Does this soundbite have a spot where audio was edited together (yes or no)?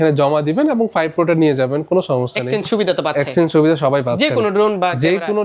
no